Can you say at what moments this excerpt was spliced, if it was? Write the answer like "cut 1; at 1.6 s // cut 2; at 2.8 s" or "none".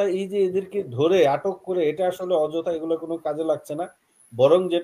none